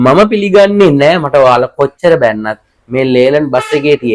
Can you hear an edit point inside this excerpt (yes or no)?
no